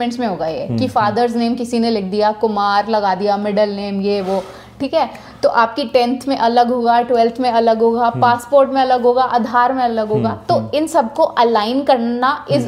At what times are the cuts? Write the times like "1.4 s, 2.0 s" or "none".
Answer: none